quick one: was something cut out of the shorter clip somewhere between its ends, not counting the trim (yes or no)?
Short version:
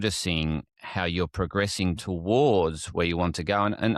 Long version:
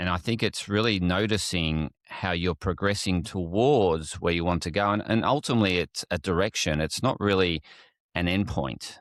no